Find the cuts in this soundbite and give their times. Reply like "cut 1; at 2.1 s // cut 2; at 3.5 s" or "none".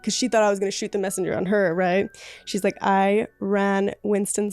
none